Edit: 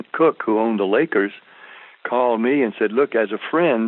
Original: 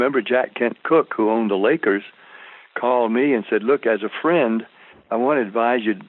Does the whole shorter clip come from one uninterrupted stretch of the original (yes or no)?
yes